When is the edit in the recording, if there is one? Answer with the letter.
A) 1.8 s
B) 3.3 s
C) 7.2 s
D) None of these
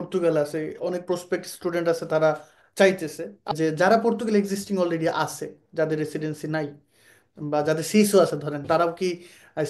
B